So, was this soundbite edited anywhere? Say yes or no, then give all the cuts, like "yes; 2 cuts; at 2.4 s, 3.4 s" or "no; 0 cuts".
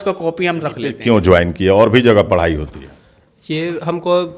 yes; 1 cut; at 0.9 s